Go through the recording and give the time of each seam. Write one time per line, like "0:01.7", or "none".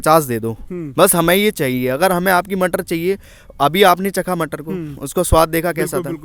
none